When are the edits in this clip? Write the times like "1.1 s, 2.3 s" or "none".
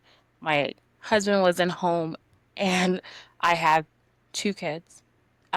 none